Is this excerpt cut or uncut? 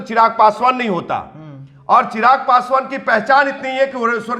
uncut